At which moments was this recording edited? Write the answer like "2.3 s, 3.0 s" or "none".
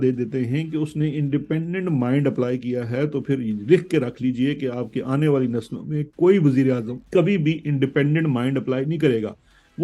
6.9 s